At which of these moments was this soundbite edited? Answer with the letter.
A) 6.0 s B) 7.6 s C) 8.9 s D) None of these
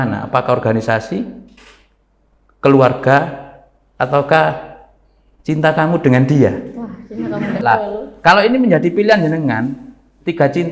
B